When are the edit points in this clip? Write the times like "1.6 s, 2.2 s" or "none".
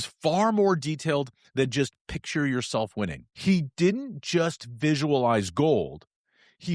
3.3 s